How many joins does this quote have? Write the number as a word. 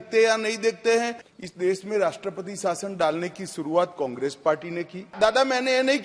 two